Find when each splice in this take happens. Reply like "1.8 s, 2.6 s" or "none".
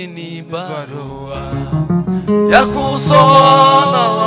none